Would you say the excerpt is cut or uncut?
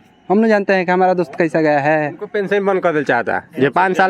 cut